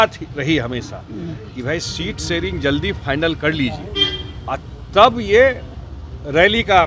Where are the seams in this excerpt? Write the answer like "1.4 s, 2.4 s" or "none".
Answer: none